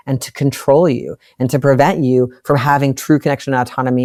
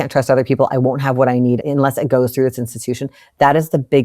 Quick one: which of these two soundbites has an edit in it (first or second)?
second